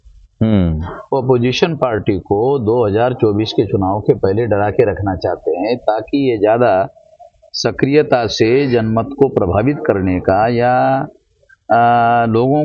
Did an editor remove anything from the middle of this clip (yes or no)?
no